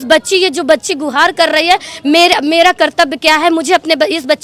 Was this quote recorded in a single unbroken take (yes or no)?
yes